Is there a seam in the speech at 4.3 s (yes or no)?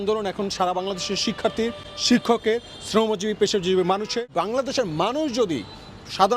yes